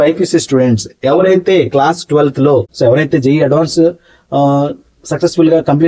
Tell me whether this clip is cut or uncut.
cut